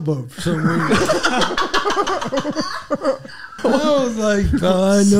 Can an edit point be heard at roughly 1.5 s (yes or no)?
no